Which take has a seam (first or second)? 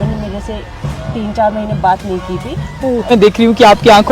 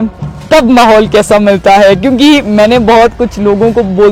first